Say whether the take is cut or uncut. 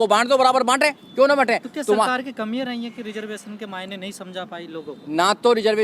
uncut